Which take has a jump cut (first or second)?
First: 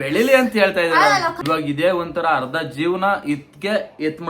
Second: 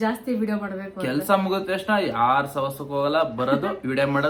first